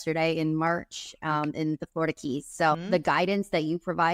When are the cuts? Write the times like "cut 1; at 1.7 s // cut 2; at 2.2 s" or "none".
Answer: cut 1; at 2.8 s

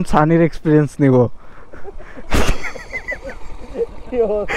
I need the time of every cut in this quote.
none

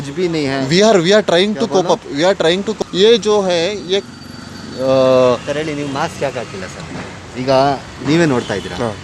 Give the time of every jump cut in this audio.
cut 1; at 2.8 s

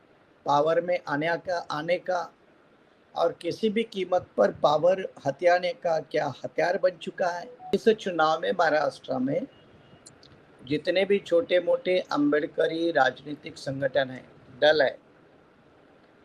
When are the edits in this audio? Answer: cut 1; at 7.7 s

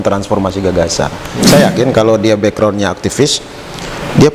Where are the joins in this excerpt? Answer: cut 1; at 1.3 s

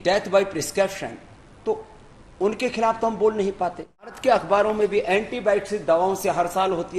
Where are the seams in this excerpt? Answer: cut 1; at 4.1 s

